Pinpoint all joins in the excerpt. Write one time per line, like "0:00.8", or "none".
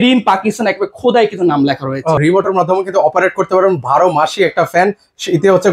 0:02.2